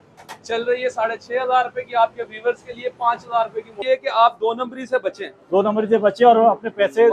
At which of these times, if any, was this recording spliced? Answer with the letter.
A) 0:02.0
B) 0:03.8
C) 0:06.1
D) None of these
B